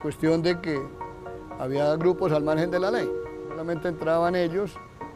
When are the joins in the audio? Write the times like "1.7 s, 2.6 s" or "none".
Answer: 3.3 s